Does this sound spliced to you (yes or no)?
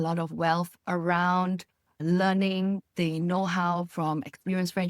no